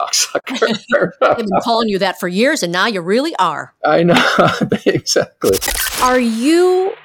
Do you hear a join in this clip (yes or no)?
yes